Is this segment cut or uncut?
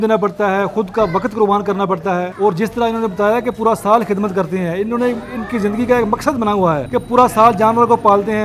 cut